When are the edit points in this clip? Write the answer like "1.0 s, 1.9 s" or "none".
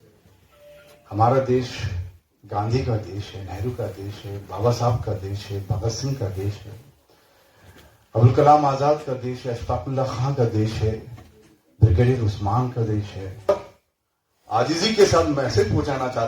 13.5 s